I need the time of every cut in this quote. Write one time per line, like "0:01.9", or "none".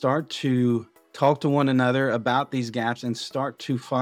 0:01.0